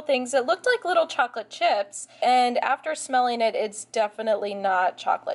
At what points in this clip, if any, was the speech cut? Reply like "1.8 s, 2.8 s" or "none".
2.1 s